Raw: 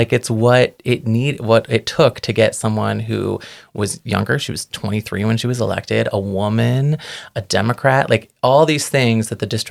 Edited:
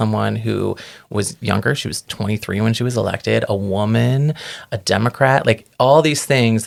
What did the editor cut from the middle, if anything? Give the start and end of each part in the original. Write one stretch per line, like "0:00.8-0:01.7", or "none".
none

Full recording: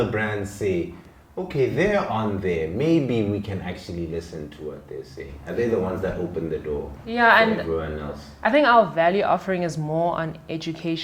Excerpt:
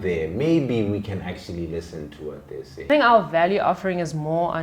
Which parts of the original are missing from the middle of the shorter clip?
0:05.3-0:08.5

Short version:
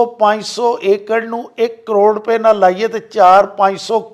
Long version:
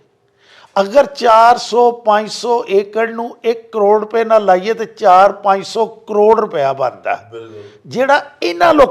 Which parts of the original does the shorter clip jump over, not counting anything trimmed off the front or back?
none

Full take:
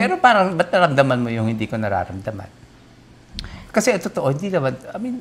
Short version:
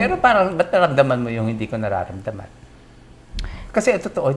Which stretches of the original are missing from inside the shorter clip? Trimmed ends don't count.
none

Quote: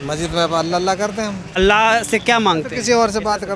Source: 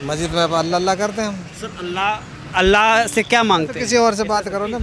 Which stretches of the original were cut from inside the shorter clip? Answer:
0:01.5-0:02.5

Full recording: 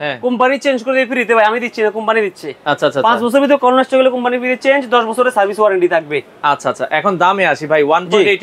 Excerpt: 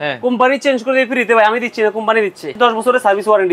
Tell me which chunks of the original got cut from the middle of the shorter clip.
0:02.5-0:04.8

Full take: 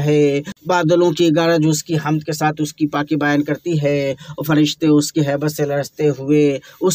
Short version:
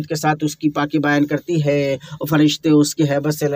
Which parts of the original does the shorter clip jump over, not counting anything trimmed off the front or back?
none

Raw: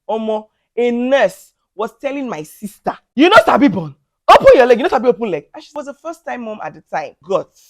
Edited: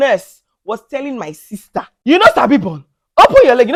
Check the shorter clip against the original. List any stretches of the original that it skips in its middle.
none

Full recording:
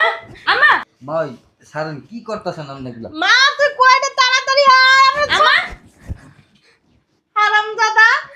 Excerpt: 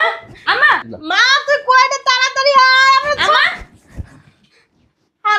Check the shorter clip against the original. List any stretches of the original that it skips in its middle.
0:00.9-0:03.0

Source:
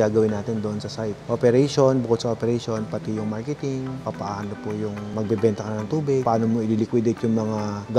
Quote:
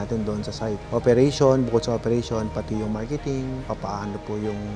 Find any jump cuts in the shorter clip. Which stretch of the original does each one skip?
none

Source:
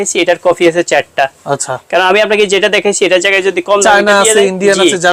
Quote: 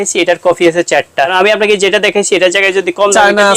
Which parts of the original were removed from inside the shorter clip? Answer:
0:01.3-0:02.0

